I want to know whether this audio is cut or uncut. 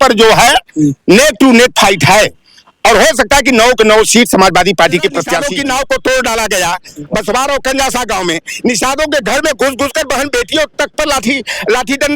cut